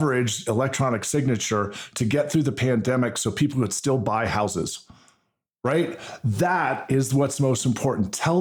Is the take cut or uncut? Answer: uncut